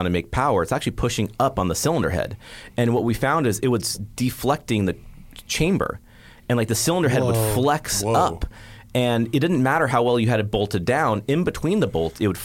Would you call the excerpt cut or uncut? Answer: uncut